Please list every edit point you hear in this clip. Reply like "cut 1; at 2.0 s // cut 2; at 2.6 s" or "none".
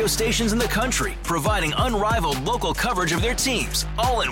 none